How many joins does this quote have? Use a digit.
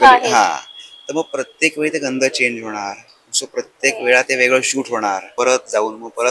1